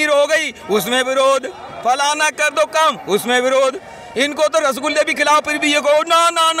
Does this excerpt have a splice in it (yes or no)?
no